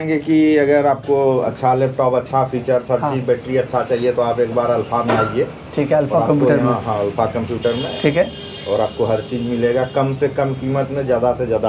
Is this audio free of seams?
yes; 0 cuts

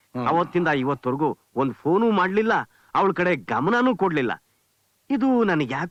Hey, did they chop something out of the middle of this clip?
no; 0 cuts

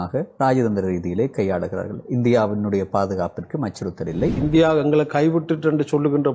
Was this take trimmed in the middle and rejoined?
yes; 1 cut; at 4.4 s

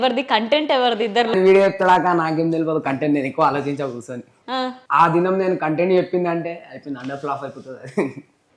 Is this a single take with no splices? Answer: no; 2 cuts; at 1.3 s, 4.8 s

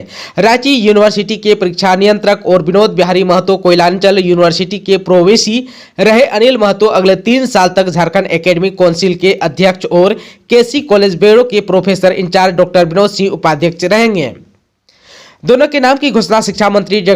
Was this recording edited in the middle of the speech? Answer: no; 0 cuts

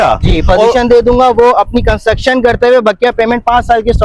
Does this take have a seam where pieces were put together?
no; 0 cuts

